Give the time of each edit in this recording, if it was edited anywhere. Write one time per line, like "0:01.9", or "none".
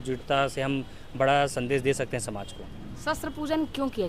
none